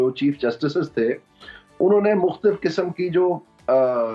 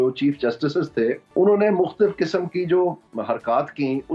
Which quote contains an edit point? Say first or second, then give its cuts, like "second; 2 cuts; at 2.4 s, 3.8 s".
second; 2 cuts; at 1.2 s, 3.1 s